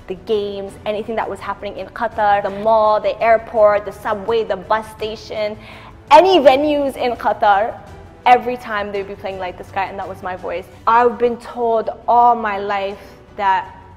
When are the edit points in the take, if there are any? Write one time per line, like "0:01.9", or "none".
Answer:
0:02.5
0:10.7